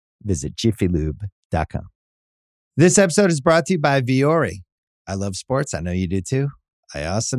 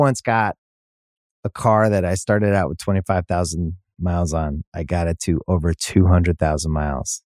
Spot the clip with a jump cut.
first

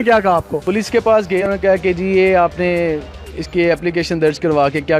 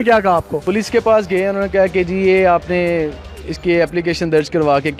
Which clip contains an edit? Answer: first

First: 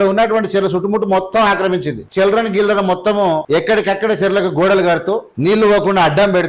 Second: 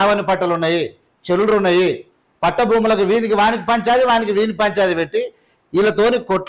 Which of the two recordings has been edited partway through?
first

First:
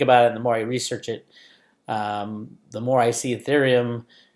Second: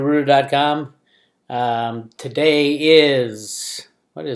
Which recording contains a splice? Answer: first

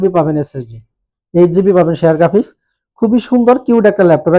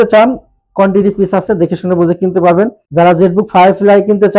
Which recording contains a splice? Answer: second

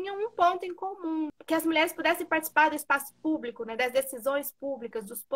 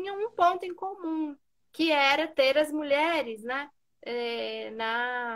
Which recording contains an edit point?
first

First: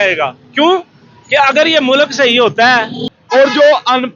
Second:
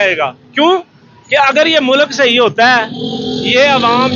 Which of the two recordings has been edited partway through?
first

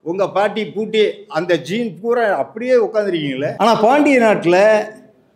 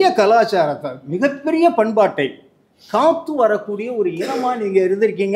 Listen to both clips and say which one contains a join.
first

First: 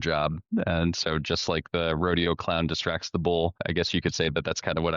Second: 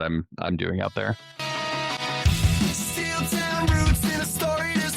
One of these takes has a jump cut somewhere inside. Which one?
second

